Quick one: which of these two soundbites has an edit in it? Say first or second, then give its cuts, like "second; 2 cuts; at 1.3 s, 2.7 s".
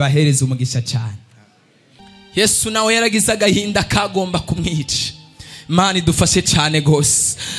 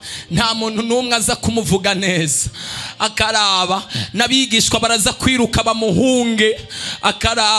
first; 1 cut; at 2.0 s